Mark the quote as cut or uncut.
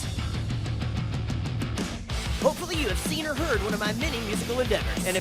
uncut